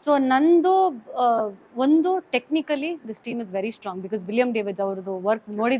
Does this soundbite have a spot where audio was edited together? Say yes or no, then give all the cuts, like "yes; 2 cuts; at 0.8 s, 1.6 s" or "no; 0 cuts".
no; 0 cuts